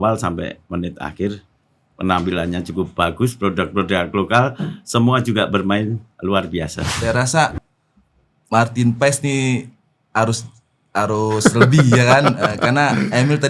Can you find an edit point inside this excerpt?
yes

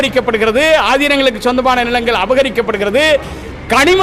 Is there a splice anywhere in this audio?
no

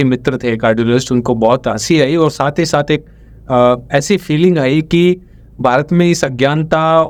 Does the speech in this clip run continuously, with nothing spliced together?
yes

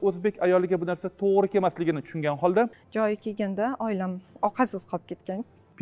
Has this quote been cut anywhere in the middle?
yes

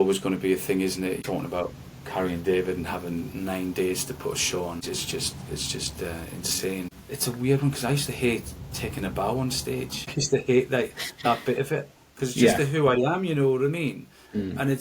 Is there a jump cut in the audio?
yes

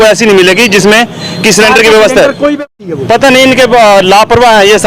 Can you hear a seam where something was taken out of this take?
yes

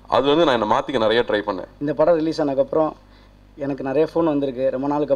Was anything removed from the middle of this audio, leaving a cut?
yes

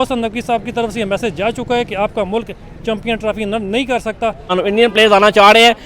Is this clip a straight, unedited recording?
no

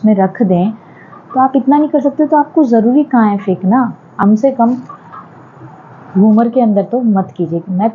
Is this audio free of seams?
no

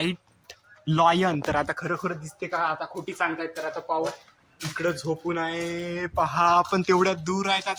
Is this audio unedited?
yes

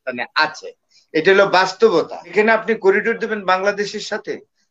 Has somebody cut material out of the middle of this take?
yes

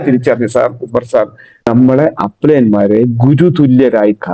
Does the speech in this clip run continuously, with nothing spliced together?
no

